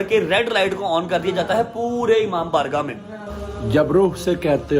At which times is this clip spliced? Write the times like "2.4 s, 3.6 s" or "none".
3.2 s